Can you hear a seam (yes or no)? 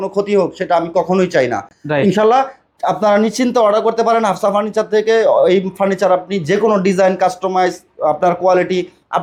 no